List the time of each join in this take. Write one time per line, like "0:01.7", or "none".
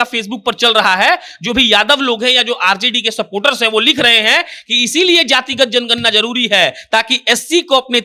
none